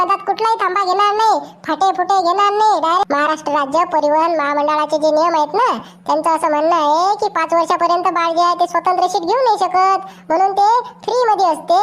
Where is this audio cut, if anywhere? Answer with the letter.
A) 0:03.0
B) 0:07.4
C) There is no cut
A